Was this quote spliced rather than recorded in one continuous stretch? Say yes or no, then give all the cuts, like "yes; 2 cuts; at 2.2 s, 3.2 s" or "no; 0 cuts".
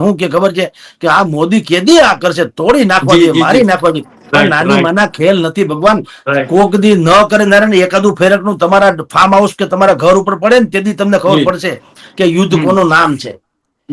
no; 0 cuts